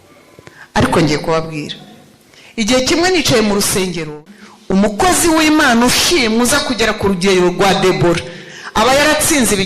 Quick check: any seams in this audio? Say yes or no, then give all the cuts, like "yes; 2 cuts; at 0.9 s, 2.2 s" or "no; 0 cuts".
yes; 1 cut; at 4.1 s